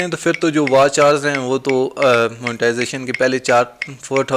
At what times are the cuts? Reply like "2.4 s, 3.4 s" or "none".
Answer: none